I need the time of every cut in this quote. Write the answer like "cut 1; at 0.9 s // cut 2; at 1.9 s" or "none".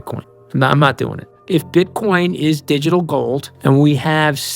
cut 1; at 1.3 s // cut 2; at 3.5 s